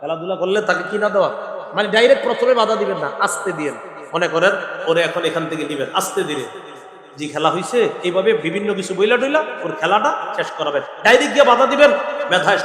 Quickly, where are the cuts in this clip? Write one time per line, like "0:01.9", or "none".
none